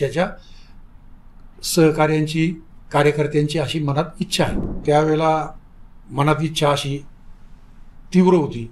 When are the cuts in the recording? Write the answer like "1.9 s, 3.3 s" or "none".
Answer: 4.6 s